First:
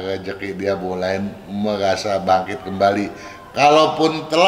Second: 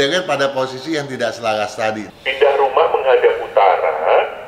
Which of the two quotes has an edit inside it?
second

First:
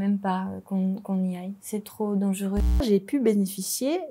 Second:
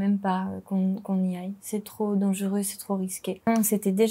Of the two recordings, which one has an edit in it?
first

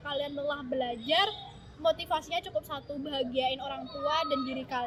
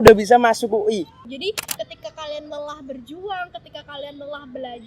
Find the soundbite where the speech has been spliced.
second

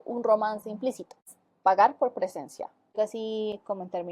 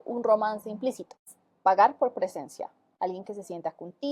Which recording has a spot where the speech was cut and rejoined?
first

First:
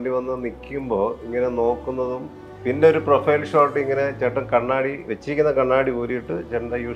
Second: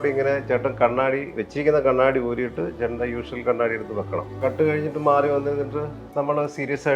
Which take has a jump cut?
second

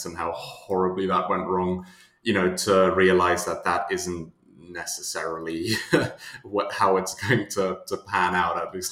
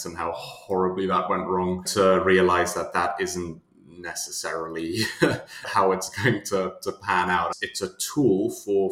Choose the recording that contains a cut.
second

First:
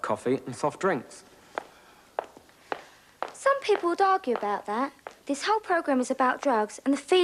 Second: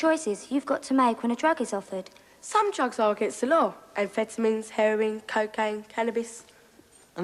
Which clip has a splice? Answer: second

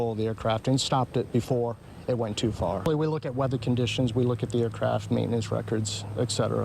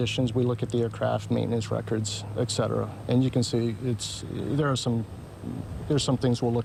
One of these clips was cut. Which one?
first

